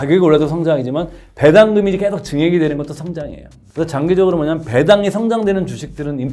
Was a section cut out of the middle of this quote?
no; 0 cuts

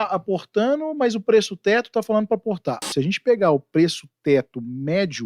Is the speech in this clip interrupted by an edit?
yes; 1 cut; at 2.9 s

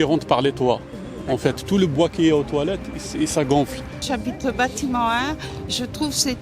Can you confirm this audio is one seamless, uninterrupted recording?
no; 1 cut; at 4.0 s

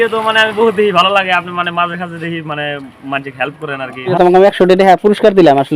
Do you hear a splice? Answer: yes; 1 cut; at 4.1 s

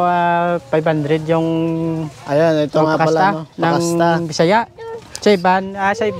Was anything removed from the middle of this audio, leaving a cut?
no; 0 cuts

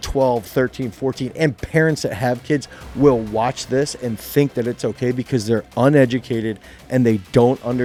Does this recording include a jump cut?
no; 0 cuts

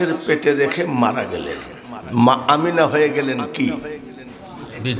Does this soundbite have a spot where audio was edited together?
no; 0 cuts

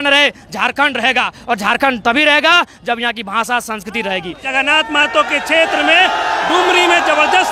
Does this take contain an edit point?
yes; 1 cut; at 4.4 s

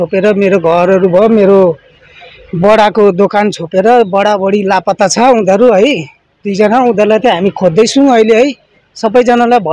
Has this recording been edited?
no; 0 cuts

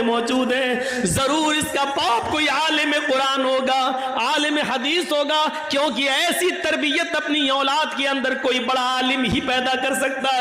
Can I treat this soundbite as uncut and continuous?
yes; 0 cuts

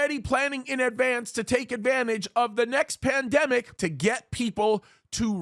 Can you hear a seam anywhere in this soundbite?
yes; 1 cut; at 3.8 s

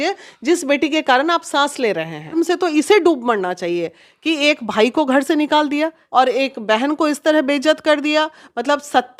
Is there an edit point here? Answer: yes; 2 cuts; at 2.3 s, 6.0 s

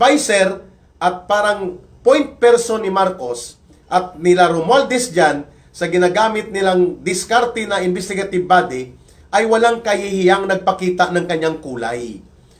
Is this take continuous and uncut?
yes; 0 cuts

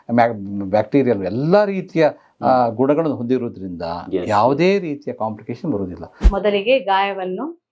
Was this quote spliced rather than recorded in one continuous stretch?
yes; 1 cut; at 6.2 s

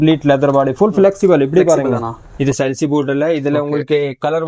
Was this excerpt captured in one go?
no; 1 cut; at 2.3 s

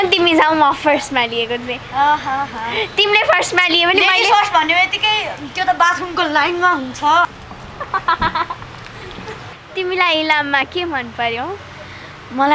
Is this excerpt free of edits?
no; 2 cuts; at 7.3 s, 9.4 s

